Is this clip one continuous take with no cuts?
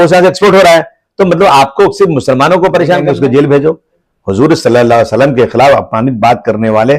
no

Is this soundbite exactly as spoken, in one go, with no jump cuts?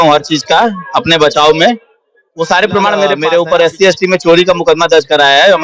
no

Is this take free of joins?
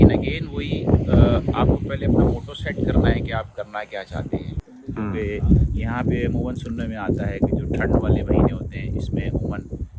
no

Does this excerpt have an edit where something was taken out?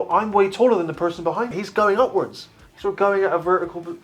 yes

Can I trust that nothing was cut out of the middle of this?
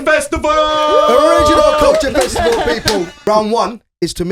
no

